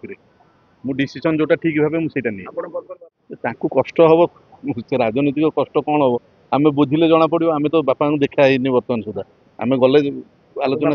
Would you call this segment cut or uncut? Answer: cut